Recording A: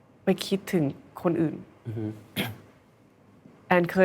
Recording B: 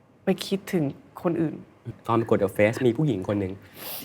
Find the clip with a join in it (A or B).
B